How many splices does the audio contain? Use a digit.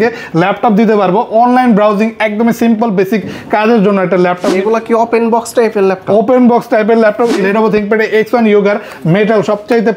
2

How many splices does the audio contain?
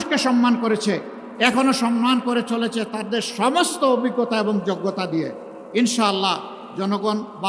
0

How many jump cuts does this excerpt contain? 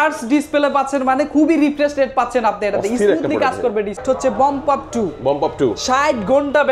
1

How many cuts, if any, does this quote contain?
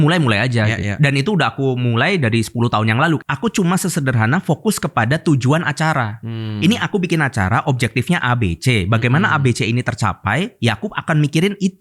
1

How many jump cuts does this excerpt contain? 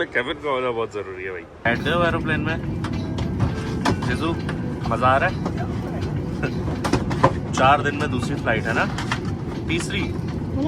1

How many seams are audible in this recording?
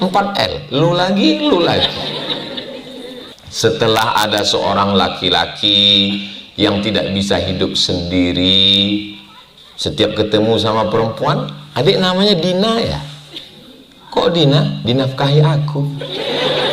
1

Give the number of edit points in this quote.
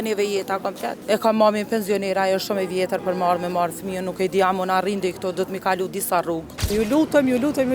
2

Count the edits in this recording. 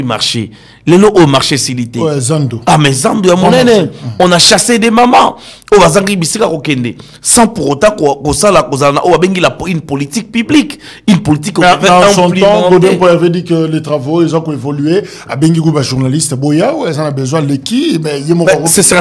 0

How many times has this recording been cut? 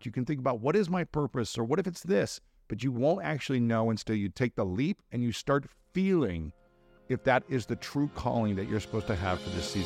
1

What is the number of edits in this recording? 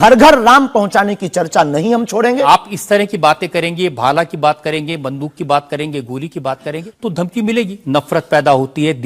3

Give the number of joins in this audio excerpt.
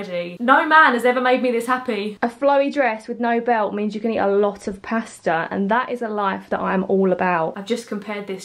2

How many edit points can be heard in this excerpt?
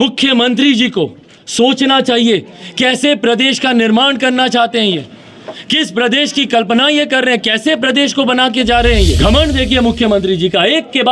1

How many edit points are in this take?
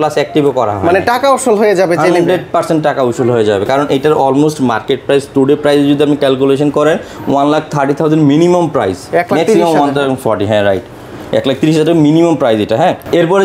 0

